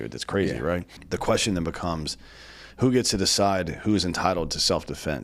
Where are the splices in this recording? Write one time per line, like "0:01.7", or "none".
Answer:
0:00.9